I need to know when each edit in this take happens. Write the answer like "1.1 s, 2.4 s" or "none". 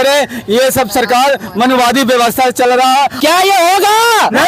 3.1 s